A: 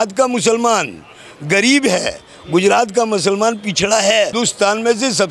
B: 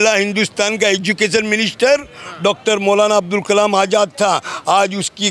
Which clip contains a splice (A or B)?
A